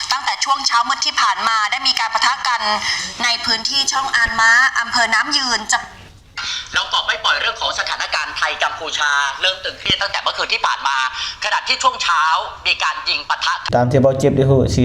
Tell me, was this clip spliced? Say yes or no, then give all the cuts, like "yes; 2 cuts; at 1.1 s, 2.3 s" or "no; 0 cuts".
yes; 1 cut; at 13.6 s